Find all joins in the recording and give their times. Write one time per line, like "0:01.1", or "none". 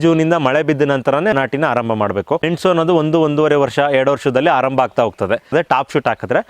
0:01.3
0:02.5
0:05.5